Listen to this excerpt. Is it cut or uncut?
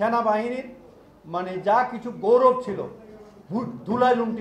uncut